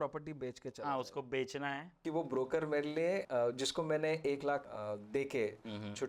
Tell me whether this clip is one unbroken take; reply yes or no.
no